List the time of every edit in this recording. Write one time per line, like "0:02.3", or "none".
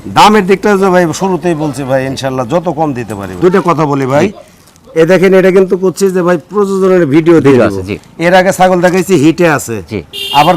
0:03.3